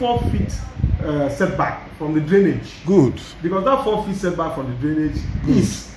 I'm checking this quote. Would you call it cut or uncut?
uncut